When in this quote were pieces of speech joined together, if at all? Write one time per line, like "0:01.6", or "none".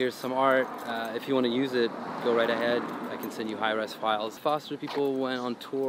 0:04.3